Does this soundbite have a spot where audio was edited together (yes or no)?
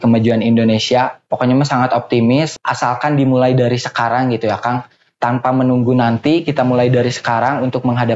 yes